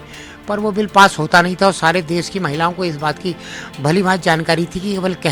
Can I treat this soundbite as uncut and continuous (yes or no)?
yes